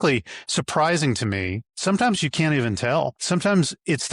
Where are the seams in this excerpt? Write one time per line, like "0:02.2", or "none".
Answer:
0:01.6
0:03.2